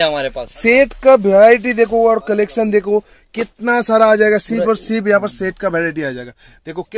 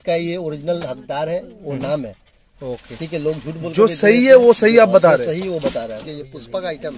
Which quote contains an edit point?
second; 1 cut; at 5.9 s

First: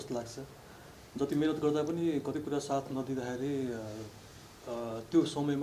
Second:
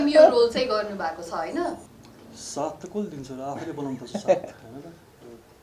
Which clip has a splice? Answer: second; 1 cut; at 1.9 s

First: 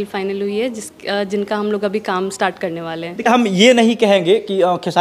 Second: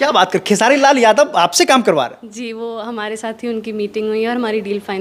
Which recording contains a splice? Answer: first; 1 cut; at 3.3 s

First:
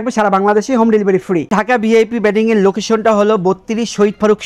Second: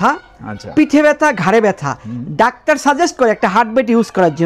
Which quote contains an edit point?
first; 1 cut; at 1.5 s

